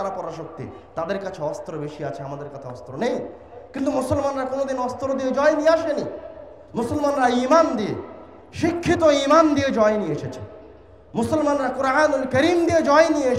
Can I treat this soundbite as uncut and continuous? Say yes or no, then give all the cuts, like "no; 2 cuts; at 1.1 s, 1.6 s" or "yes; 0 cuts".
yes; 0 cuts